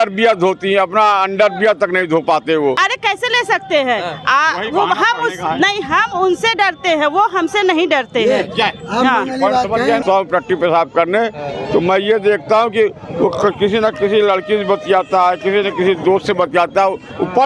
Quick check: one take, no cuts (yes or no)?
no